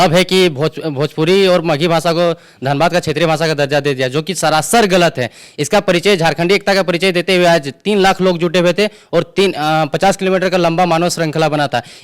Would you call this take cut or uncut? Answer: uncut